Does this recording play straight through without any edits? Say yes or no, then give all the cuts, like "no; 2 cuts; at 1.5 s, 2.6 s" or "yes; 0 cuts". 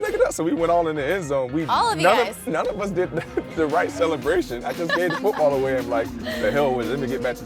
yes; 0 cuts